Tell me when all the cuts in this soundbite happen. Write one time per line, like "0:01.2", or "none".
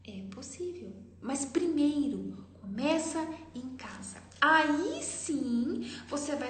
0:01.1